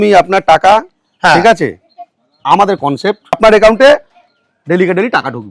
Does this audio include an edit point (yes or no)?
yes